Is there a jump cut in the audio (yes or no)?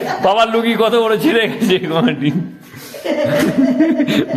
no